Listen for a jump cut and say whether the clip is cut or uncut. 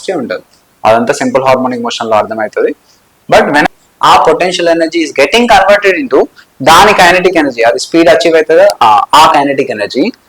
cut